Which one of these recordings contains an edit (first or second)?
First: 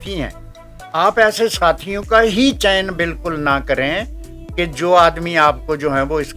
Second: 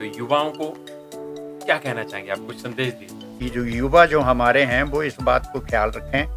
second